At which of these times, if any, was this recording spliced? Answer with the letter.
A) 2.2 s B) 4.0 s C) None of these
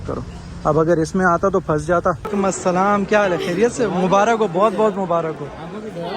A